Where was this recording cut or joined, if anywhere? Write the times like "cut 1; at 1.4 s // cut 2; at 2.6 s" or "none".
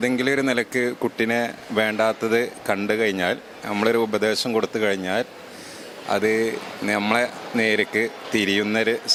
none